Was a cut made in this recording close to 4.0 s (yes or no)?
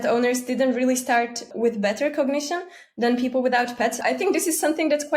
yes